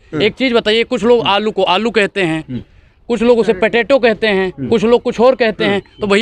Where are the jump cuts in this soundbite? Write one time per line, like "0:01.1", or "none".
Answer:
none